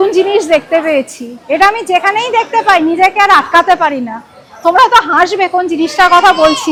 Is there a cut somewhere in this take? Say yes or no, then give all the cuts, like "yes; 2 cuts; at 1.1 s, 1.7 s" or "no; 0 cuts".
no; 0 cuts